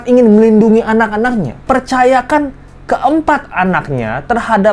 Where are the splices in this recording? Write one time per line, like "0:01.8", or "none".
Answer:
0:01.6